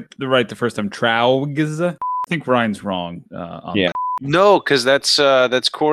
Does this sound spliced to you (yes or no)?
yes